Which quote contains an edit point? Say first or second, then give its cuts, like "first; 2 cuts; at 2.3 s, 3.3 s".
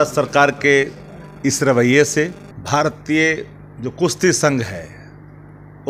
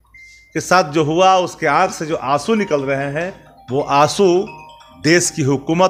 first; 1 cut; at 2.5 s